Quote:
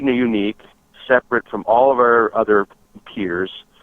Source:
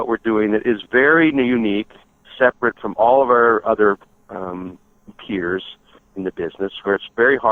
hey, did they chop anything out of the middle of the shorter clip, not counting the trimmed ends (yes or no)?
yes